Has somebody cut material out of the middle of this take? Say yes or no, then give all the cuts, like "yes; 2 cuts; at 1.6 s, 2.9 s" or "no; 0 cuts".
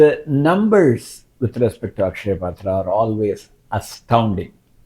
no; 0 cuts